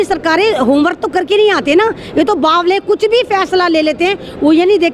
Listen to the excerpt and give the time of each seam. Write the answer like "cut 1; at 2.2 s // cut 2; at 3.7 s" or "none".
none